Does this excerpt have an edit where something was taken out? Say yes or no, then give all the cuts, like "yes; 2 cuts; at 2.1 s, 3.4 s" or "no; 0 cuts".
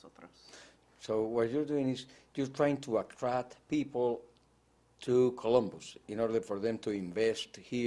yes; 1 cut; at 3.1 s